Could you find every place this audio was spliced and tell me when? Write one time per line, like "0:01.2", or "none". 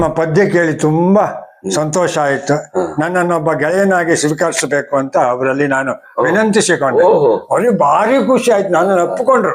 none

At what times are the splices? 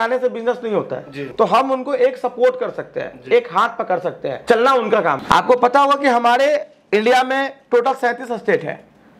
0:01.2
0:04.3
0:05.2

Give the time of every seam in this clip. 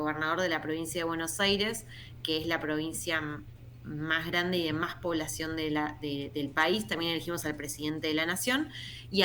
none

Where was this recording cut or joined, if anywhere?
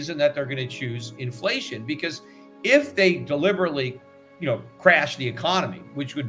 none

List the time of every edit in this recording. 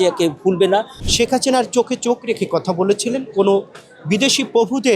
0:01.0

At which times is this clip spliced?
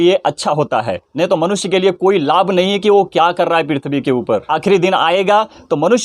0:01.0
0:04.4

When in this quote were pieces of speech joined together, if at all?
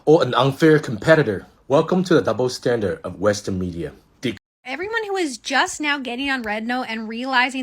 0:04.4

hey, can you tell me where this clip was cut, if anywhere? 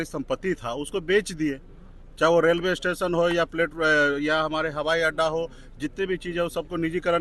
none

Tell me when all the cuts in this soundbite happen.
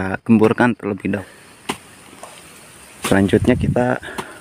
0:01.2

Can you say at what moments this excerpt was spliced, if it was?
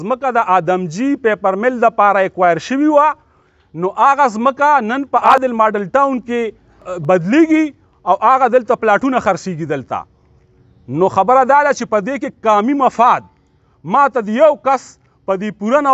0:05.3
0:06.9

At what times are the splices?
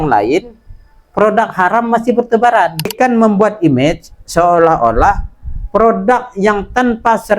0:02.9

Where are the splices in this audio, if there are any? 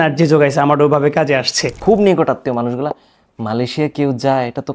0:01.7

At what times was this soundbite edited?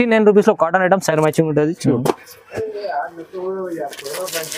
0:01.1

